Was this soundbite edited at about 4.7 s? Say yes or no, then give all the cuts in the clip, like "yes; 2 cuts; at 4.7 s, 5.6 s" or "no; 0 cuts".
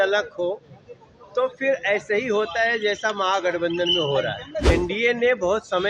yes; 1 cut; at 4.7 s